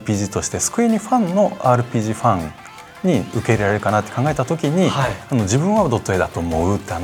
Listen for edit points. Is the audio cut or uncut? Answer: uncut